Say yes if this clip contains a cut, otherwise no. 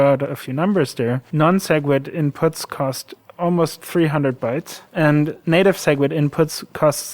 yes